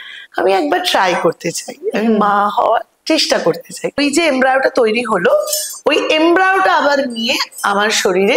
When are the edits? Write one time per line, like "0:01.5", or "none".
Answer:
0:04.0